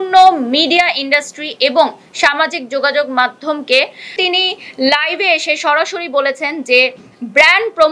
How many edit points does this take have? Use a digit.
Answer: 1